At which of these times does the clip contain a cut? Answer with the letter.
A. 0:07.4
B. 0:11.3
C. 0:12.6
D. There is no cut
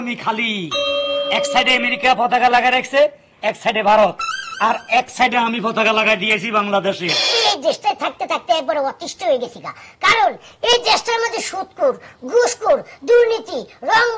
A